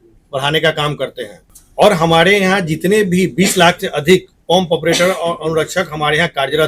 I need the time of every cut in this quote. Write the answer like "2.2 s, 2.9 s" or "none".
none